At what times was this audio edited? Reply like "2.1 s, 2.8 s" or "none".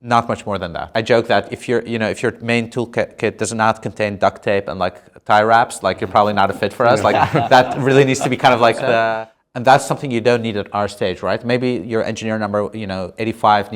0.9 s, 9.3 s